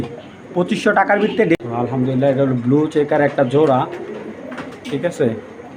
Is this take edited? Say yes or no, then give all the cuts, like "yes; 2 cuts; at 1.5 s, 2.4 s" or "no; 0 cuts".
yes; 1 cut; at 1.6 s